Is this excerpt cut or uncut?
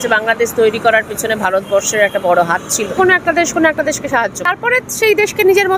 cut